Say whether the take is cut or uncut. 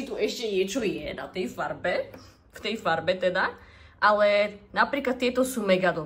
uncut